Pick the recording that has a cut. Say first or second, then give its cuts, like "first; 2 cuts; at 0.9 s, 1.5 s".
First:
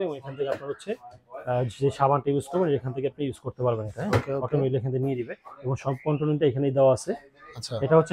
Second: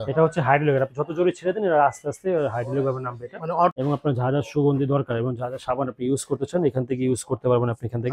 second; 1 cut; at 3.7 s